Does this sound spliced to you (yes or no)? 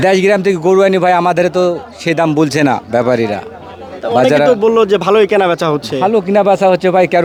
no